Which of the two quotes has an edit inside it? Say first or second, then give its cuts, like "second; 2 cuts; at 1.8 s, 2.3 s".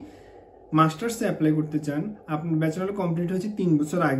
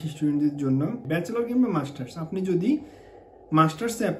second; 1 cut; at 1.0 s